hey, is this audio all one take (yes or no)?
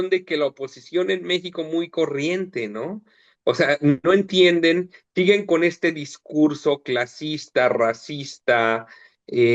yes